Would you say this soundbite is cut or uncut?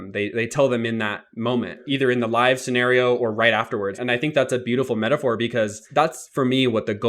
cut